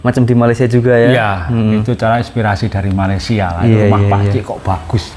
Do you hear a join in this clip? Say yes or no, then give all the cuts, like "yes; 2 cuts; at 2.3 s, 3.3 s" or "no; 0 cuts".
no; 0 cuts